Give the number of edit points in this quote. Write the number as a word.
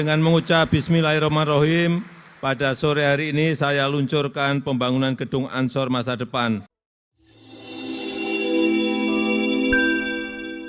one